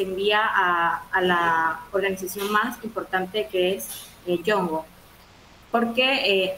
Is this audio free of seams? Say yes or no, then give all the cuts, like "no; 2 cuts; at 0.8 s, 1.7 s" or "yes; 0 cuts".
yes; 0 cuts